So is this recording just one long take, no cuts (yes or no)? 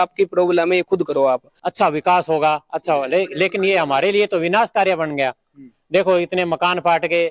no